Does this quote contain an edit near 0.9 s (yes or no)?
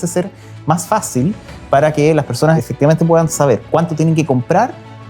no